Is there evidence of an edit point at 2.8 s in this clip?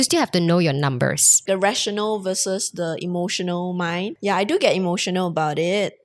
no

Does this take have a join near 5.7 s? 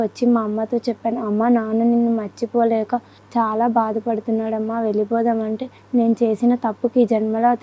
yes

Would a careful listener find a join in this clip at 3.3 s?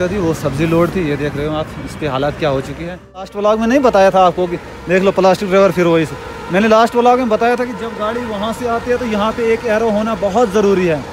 yes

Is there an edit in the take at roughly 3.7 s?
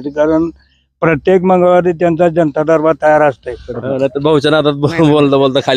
yes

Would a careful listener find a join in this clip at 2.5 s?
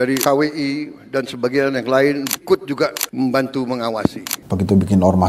no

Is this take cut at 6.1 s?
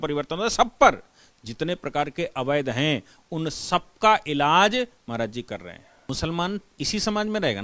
yes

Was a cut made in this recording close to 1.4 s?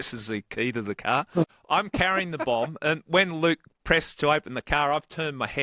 yes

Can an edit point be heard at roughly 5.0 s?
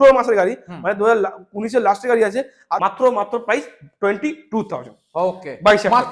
no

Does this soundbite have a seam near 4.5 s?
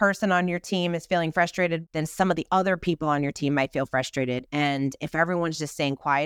yes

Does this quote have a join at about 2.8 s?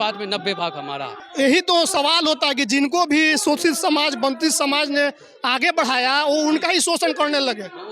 no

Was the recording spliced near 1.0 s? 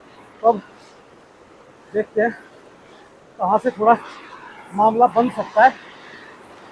no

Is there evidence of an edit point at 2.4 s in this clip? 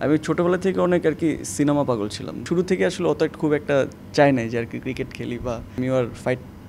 yes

